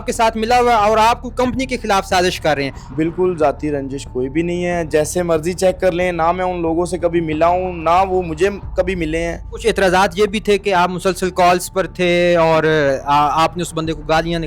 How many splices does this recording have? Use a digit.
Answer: 2